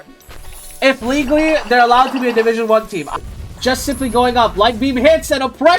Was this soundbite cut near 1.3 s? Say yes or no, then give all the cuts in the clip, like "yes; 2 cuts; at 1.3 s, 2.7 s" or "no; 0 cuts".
no; 1 cut; at 3.1 s